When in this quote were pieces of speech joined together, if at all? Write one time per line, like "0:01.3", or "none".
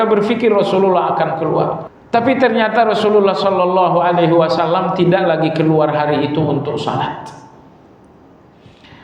0:01.9